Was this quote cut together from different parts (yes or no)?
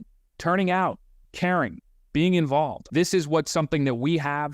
yes